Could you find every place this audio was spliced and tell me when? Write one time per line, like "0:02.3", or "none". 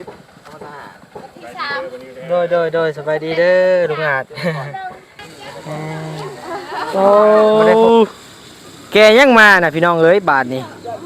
0:06.9